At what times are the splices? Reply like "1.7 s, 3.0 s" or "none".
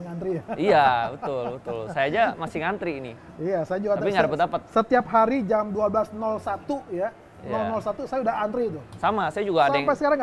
none

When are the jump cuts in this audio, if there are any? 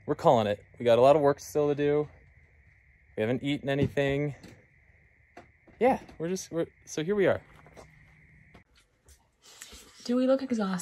8.6 s

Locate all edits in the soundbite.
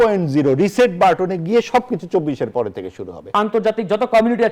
3.4 s

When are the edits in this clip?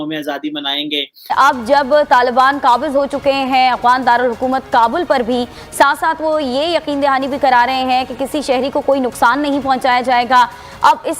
1.1 s

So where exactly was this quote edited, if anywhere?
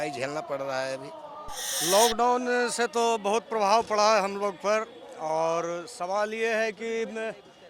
1.8 s

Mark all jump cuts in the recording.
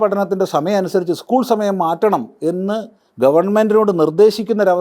none

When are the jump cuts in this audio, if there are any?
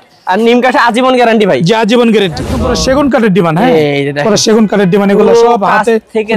2.5 s

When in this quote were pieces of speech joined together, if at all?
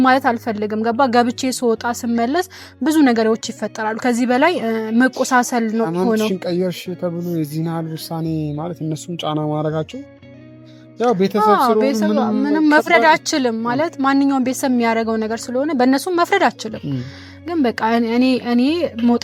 none

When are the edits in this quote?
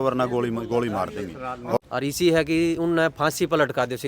1.9 s

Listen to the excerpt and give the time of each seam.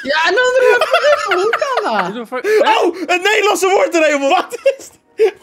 4.3 s

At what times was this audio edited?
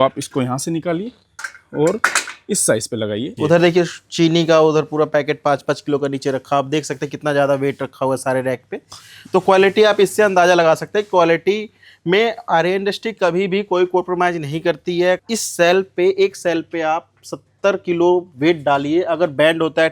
3.3 s, 15.2 s

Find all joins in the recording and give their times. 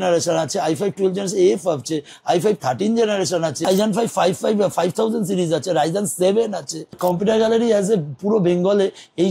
3.7 s, 7.0 s

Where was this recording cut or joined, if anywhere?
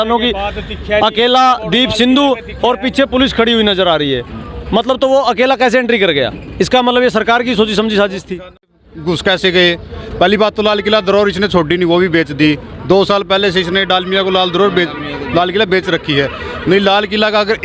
8.8 s

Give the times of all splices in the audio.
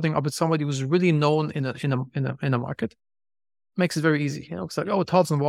none

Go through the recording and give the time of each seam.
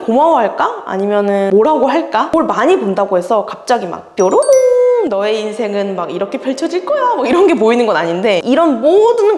2.3 s, 8.4 s

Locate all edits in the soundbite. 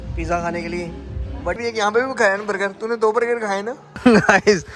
1.6 s, 3.9 s

